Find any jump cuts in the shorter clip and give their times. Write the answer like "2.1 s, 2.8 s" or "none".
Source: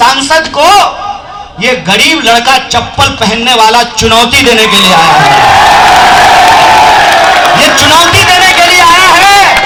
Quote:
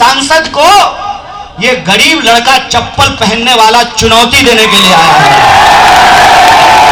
none